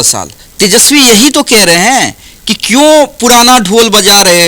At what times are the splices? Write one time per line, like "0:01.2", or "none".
none